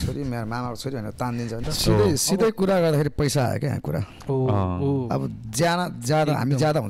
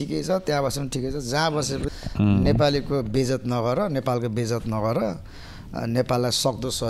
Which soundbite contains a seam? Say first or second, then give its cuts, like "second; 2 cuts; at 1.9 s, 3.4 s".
first; 1 cut; at 1.7 s